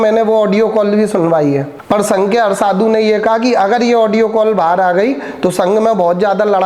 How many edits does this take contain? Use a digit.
1